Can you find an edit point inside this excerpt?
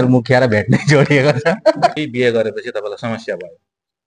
yes; 1 cut; at 1.9 s

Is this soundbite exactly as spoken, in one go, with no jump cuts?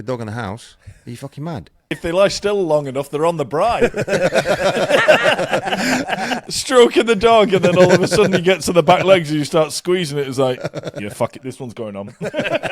no; 2 cuts; at 1.9 s, 6.5 s

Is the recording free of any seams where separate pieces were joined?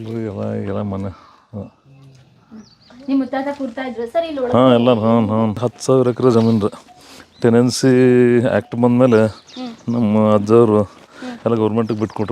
no; 1 cut; at 5.7 s

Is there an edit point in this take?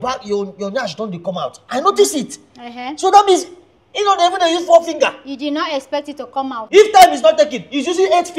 yes; 1 cut; at 6.6 s

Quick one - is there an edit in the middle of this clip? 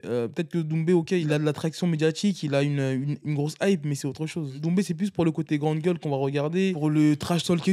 yes; 3 cuts; at 1.2 s, 4.5 s, 6.8 s

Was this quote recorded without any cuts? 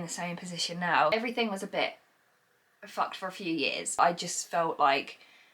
no; 2 cuts; at 1.1 s, 4.0 s

